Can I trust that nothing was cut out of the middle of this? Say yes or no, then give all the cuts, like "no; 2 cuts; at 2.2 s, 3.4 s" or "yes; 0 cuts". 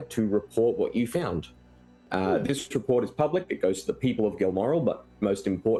yes; 0 cuts